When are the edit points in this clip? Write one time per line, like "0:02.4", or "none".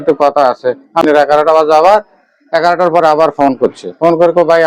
0:01.0